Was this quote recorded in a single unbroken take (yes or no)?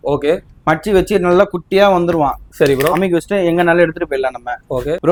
yes